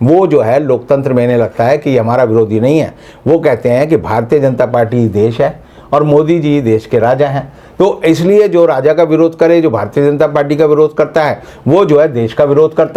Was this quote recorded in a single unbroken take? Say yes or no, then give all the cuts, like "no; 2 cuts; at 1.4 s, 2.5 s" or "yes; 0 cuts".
yes; 0 cuts